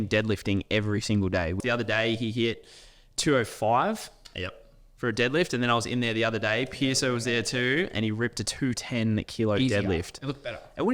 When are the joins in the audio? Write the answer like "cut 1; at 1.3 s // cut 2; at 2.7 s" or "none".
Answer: cut 1; at 1.6 s